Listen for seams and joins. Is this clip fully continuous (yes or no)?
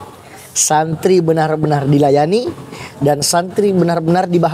yes